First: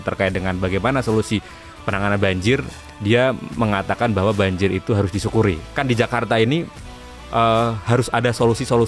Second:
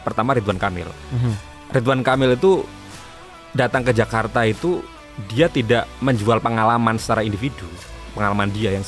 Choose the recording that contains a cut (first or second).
first